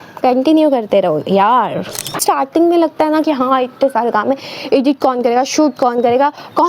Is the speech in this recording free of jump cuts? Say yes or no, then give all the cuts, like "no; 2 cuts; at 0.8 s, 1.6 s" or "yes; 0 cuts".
no; 1 cut; at 2.2 s